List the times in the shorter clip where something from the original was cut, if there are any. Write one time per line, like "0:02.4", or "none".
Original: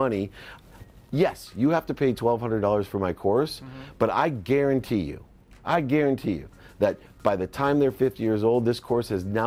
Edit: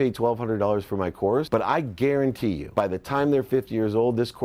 0:01.5
0:02.6